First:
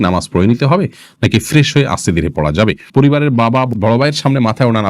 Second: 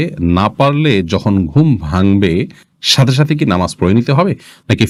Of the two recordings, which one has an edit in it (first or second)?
first